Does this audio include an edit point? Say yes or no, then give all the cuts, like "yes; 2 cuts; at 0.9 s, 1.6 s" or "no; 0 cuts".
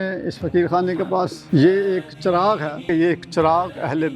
yes; 2 cuts; at 1.4 s, 2.8 s